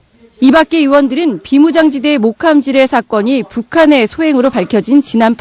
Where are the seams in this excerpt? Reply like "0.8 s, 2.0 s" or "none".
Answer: 4.0 s